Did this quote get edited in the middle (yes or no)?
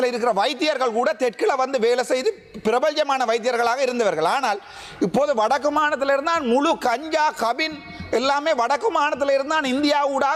no